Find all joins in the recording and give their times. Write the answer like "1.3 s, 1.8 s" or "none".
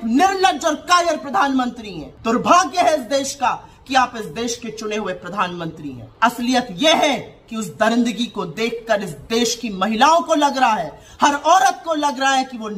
2.1 s, 6.0 s